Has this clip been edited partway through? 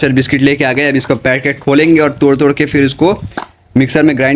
no; 0 cuts

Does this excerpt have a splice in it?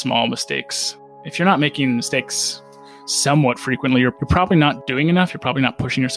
yes; 1 cut; at 4.8 s

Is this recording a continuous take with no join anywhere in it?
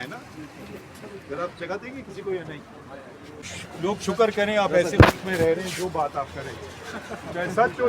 no; 1 cut; at 3.6 s

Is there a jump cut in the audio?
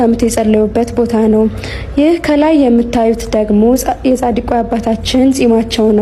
no; 0 cuts

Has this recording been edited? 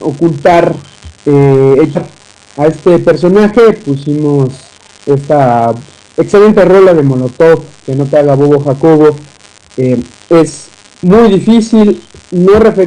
no; 0 cuts

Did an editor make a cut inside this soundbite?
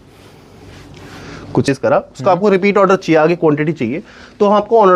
yes; 1 cut; at 1.7 s

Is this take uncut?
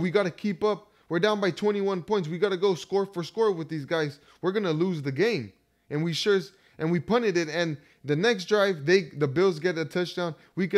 yes; 0 cuts

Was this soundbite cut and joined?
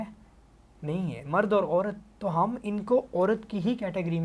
no; 0 cuts

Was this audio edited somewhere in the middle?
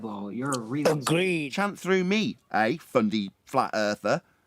yes; 1 cut; at 1.5 s

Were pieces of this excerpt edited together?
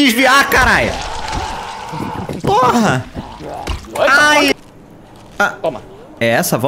yes; 1 cut; at 4.5 s

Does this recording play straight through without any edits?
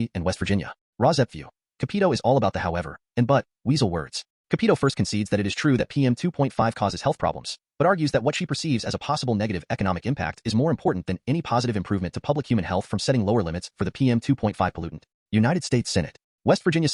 yes; 0 cuts

